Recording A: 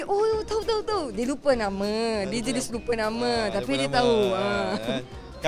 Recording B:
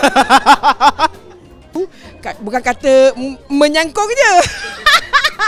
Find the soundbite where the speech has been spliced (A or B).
B